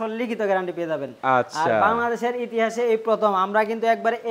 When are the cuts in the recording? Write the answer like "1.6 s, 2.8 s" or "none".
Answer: none